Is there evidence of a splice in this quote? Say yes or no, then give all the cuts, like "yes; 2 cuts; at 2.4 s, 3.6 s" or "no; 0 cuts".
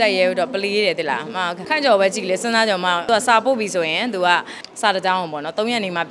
yes; 3 cuts; at 1.6 s, 3.0 s, 4.6 s